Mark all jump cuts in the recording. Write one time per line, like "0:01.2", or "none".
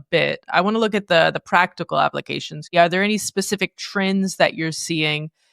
0:02.7